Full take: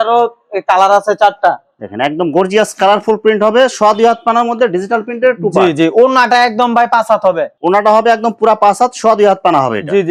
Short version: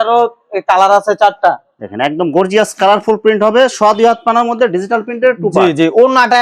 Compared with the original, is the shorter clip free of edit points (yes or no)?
yes